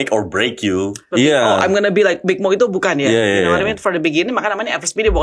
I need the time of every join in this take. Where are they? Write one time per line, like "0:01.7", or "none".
0:01.0
0:02.2